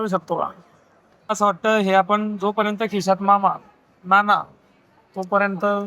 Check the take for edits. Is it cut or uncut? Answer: cut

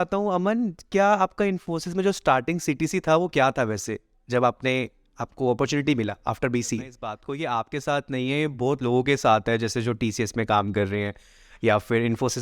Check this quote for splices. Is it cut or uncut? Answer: cut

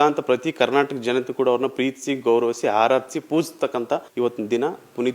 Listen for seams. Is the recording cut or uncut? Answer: cut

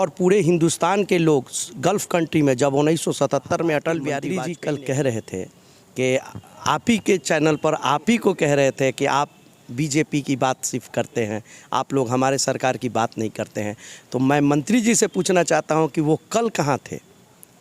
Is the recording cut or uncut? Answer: cut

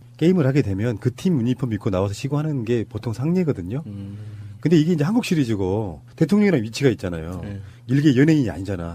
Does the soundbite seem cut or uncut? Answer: uncut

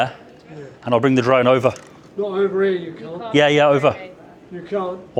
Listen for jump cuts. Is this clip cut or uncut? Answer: uncut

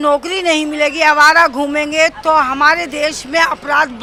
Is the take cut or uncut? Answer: uncut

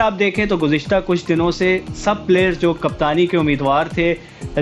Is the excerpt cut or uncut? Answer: uncut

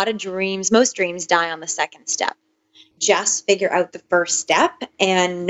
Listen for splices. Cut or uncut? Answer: cut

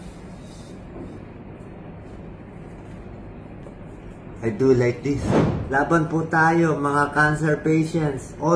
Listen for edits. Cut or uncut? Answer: cut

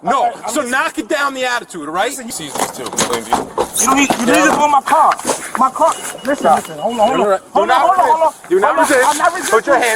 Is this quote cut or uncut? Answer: cut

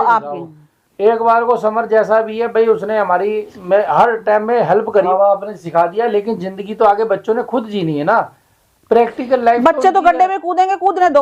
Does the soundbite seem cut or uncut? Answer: cut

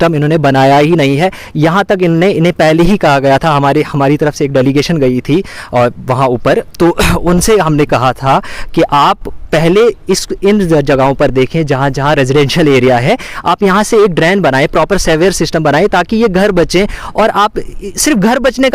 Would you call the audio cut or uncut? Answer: uncut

